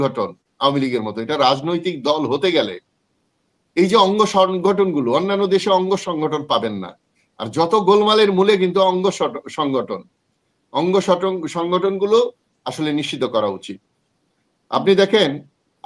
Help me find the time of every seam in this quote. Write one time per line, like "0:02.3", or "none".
none